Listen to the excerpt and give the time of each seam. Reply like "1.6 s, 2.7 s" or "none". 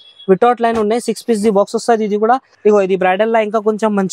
2.5 s